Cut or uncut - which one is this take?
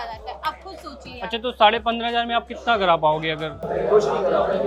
uncut